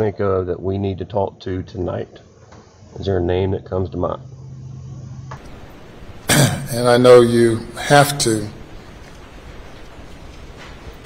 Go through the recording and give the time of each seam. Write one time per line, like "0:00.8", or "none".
0:05.4